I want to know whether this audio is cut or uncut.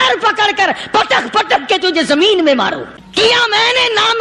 cut